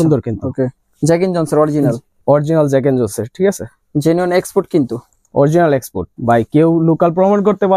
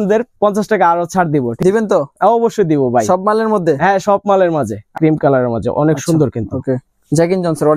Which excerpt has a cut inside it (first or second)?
second